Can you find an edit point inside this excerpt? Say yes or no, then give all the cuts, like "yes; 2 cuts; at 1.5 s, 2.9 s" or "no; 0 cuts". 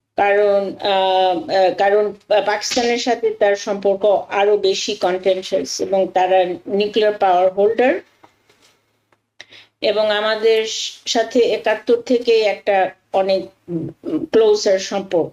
no; 0 cuts